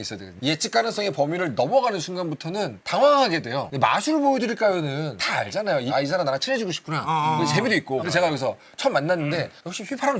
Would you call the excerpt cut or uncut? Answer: cut